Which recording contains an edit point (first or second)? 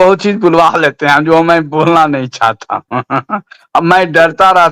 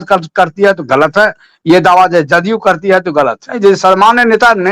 second